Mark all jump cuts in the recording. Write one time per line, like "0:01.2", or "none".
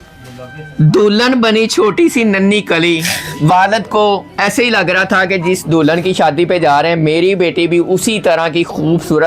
none